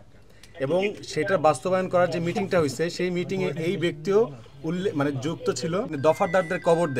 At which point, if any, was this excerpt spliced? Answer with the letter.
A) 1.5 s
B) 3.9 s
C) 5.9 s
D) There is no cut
C